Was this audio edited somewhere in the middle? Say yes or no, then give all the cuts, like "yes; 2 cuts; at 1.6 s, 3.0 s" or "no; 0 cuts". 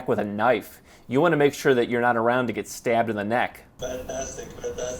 yes; 1 cut; at 3.6 s